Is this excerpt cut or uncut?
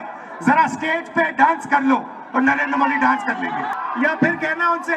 cut